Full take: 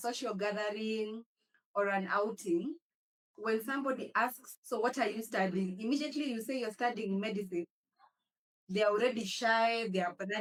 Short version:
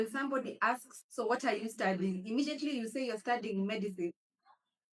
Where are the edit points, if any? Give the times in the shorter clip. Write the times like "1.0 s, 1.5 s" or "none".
none